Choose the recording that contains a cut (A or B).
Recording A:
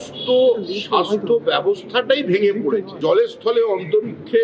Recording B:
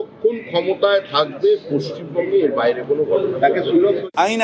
A